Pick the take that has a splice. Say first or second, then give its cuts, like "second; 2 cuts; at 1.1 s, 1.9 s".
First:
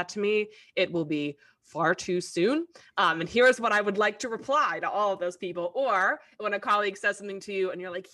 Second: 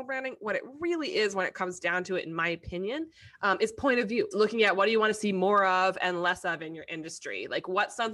second; 1 cut; at 4.3 s